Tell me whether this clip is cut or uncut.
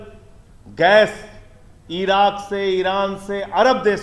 uncut